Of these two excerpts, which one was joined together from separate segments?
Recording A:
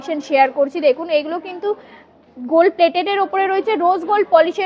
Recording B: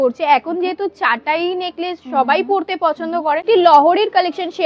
B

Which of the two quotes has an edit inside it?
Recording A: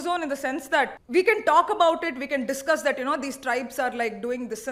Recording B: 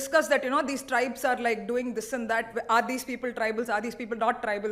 A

